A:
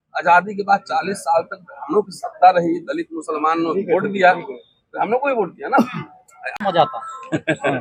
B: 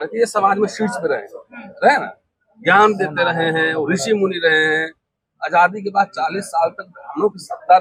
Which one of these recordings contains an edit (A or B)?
A